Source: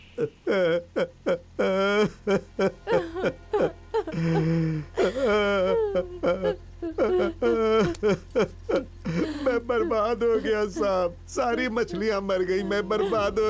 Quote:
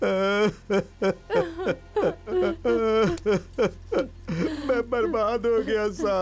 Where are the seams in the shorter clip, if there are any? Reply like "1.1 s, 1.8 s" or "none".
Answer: 2.3 s